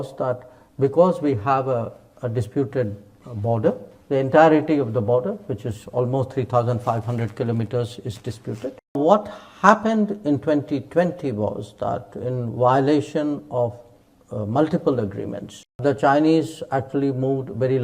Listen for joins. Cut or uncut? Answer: cut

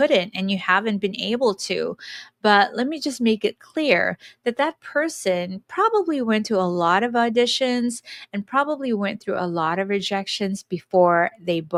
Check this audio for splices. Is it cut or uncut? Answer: uncut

